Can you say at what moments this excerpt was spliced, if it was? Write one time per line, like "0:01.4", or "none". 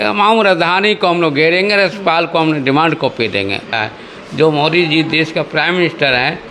0:03.7